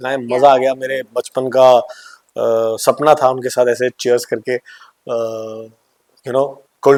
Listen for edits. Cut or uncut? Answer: uncut